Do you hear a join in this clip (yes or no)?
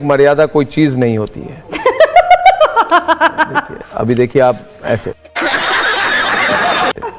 no